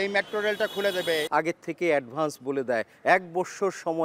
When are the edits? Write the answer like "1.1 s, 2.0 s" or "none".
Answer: 1.3 s